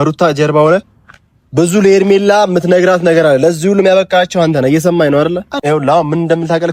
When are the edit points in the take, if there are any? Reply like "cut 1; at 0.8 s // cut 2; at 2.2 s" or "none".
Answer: cut 1; at 5.5 s